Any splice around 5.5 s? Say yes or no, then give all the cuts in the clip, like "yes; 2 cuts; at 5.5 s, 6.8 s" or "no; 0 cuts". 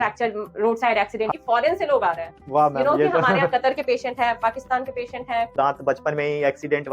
yes; 2 cuts; at 1.3 s, 5.5 s